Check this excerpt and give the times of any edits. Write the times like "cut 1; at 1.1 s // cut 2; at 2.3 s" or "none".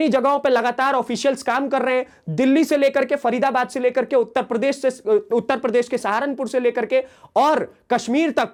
none